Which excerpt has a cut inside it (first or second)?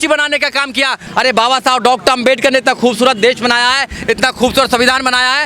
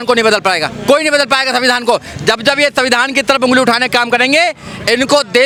first